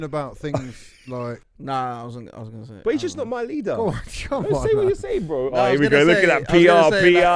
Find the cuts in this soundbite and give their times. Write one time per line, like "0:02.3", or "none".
0:01.4